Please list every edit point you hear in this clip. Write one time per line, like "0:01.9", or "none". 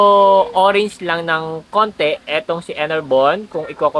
none